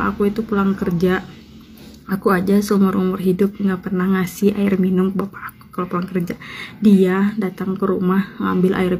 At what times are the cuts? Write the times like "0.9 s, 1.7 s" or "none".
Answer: none